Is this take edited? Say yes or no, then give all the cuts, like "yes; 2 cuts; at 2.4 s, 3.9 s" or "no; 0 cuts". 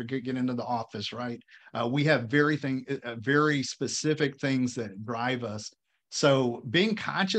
no; 0 cuts